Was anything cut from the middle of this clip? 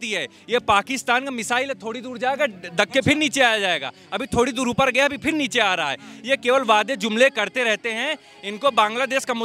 no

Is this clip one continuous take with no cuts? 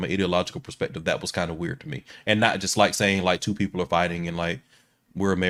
yes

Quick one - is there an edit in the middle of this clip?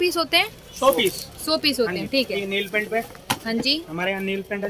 yes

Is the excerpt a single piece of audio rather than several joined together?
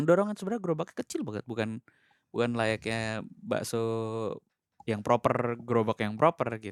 yes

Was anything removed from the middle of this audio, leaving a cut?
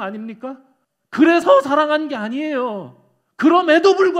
yes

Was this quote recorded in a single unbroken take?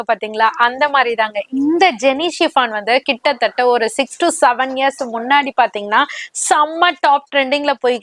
yes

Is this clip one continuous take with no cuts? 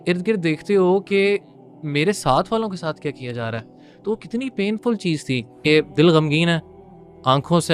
no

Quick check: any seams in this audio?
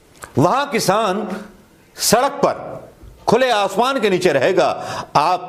no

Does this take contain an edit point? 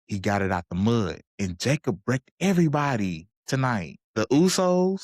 yes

